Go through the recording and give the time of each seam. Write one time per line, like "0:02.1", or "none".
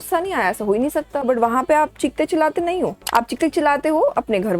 0:01.2
0:03.0